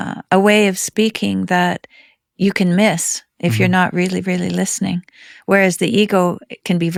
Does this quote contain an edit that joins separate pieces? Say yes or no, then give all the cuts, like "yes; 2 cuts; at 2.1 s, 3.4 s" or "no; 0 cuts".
no; 0 cuts